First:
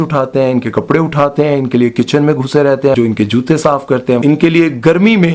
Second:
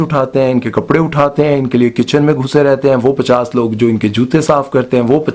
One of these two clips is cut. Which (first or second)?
first